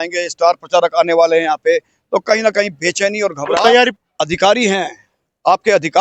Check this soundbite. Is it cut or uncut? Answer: cut